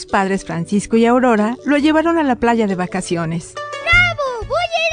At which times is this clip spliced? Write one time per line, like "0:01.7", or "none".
0:03.8